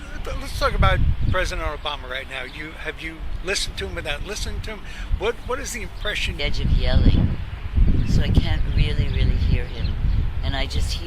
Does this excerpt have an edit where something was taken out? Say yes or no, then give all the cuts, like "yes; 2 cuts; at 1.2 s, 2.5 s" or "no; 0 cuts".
no; 0 cuts